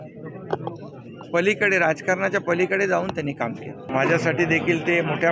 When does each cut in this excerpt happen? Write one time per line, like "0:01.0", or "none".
0:03.8